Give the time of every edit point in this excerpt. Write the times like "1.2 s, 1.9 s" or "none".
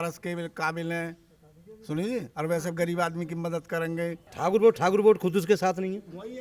4.3 s